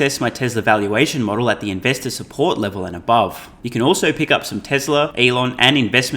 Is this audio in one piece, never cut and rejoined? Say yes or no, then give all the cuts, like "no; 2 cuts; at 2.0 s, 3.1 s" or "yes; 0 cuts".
no; 2 cuts; at 3.5 s, 5.1 s